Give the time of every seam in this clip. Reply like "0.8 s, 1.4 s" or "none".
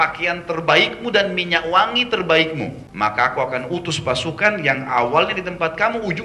2.8 s